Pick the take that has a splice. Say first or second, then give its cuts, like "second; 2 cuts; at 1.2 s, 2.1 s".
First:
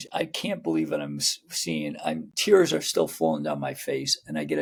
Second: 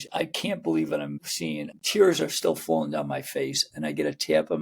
second; 1 cut; at 1.6 s